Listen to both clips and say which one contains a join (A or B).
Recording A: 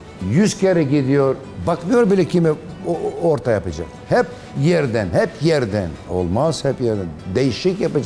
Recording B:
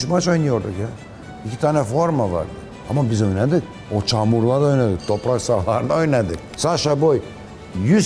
B